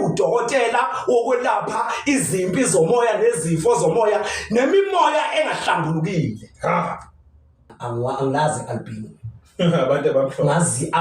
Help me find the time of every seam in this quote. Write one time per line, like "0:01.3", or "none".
0:07.8